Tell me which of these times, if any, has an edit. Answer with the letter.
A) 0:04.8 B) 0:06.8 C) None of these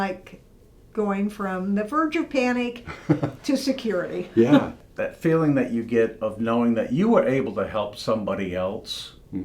A